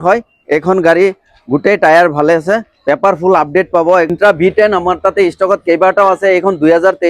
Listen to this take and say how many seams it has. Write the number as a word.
one